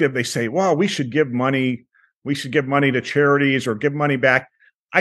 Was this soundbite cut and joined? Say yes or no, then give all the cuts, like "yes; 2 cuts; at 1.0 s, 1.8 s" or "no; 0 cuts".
no; 0 cuts